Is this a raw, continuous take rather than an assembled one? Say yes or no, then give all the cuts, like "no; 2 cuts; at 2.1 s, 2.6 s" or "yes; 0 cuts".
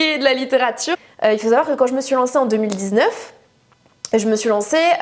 no; 1 cut; at 0.9 s